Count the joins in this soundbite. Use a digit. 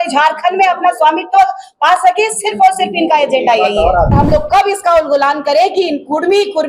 1